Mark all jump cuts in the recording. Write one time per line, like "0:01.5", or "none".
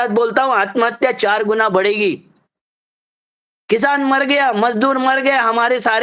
none